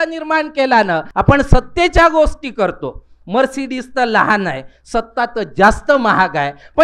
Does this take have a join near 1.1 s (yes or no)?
yes